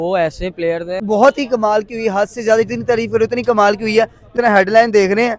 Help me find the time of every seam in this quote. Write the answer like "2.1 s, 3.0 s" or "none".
1.0 s, 4.3 s